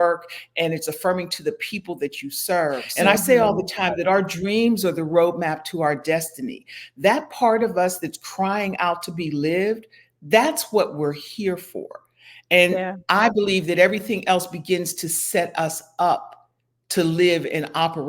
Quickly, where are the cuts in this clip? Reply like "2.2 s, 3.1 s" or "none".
2.9 s